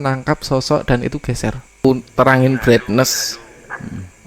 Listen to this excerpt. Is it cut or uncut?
cut